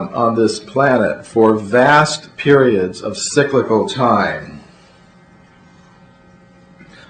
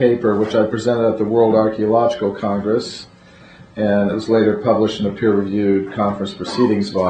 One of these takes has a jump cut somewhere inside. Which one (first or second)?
first